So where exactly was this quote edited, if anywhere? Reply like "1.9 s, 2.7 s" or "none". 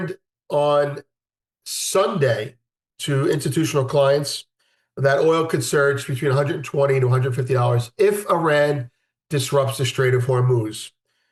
none